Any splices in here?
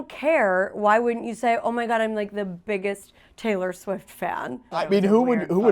yes; 1 cut; at 4.8 s

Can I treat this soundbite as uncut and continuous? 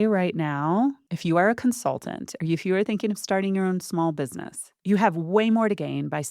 no; 2 cuts; at 1.1 s, 4.7 s

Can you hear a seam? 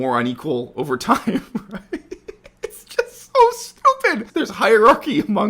yes; 1 cut; at 4.3 s

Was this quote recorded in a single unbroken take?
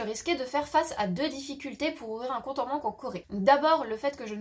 no; 1 cut; at 3.2 s

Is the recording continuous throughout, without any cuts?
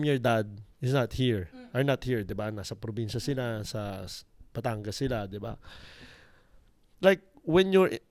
yes; 0 cuts

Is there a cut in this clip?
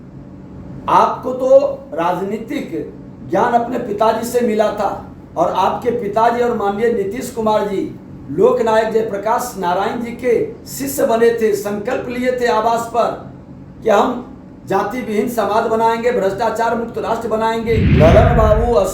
yes; 1 cut; at 17.9 s

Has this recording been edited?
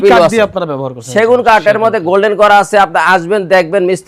no; 0 cuts

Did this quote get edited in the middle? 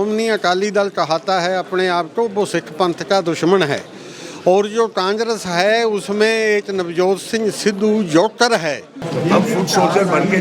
yes; 1 cut; at 9.0 s

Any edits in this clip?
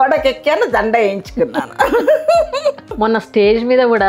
yes; 1 cut; at 2.9 s

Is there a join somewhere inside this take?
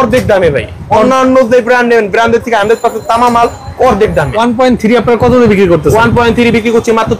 yes; 1 cut; at 4.3 s

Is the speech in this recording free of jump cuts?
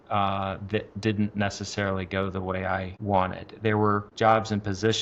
no; 2 cuts; at 2.9 s, 4.1 s

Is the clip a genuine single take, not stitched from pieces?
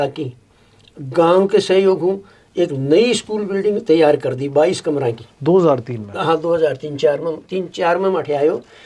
yes; 0 cuts

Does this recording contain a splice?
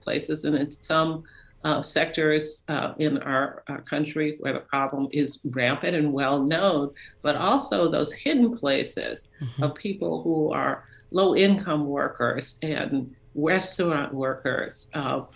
no; 0 cuts

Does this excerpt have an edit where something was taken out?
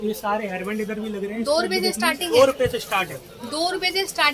yes; 1 cut; at 2.3 s

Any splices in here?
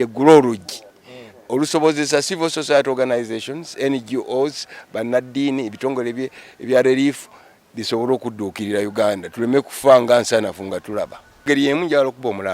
yes; 1 cut; at 11.5 s

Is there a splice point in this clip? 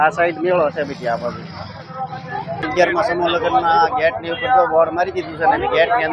no; 0 cuts

